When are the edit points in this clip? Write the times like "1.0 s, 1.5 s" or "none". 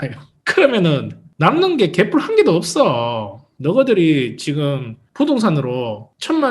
3.4 s